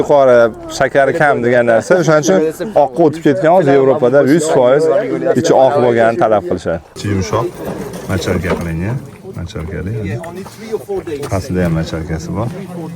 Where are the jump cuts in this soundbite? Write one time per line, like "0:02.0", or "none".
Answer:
0:07.0